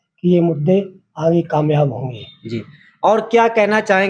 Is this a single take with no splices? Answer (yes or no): yes